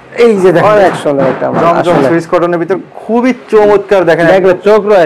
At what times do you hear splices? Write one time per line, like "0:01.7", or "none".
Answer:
none